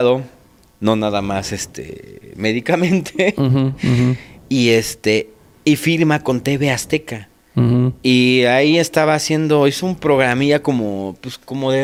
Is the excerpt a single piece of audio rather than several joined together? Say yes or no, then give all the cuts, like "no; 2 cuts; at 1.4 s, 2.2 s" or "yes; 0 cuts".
yes; 0 cuts